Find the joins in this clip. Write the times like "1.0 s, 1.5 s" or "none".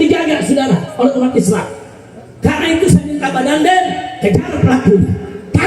none